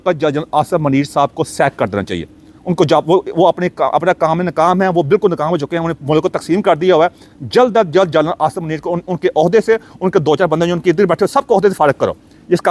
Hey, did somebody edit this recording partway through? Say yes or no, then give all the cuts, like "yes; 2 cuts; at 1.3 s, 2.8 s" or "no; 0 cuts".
no; 0 cuts